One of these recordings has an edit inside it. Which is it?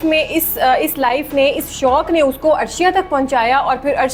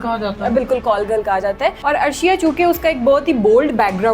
second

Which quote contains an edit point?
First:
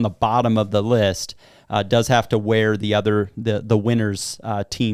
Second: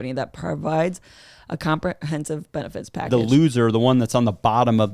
second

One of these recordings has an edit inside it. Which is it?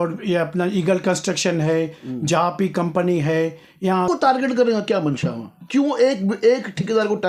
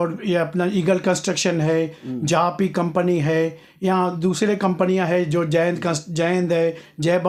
first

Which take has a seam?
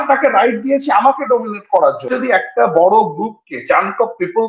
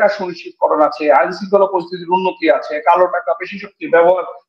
first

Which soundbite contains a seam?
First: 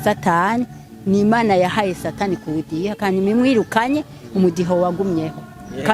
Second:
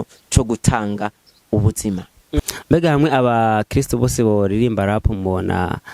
second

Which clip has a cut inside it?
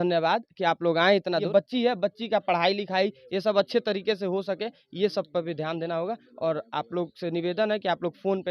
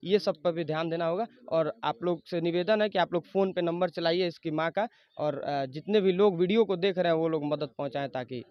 first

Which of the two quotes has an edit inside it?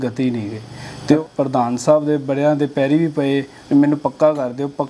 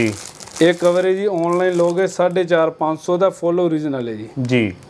first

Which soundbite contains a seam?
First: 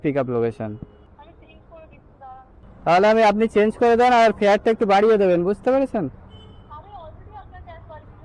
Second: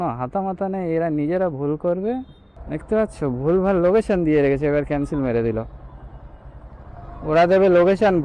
first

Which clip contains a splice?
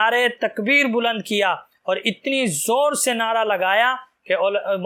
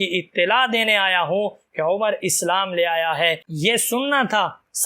second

